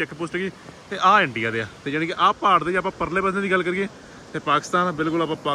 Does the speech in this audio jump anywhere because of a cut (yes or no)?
no